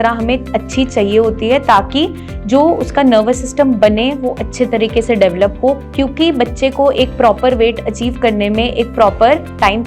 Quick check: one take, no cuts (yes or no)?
no